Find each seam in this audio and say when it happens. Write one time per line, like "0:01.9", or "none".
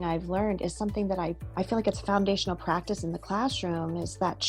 0:01.4